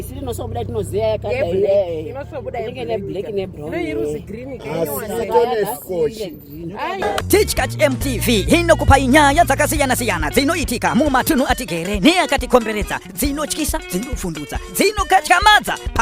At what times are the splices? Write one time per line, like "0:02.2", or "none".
0:07.0